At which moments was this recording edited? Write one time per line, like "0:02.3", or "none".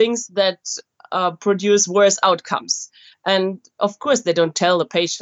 none